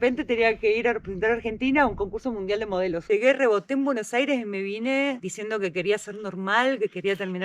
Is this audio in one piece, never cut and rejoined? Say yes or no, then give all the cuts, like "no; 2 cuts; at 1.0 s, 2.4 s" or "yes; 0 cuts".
no; 1 cut; at 3.0 s